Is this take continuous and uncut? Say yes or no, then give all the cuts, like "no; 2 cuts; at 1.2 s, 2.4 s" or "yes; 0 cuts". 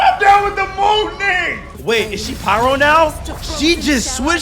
no; 1 cut; at 1.7 s